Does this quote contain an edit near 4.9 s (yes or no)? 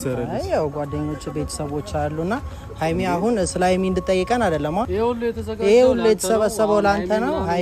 yes